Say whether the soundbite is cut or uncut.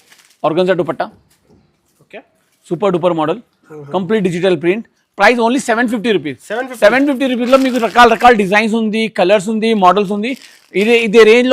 uncut